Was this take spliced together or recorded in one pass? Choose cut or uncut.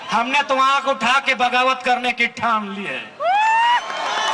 uncut